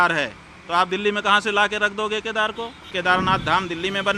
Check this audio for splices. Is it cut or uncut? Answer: cut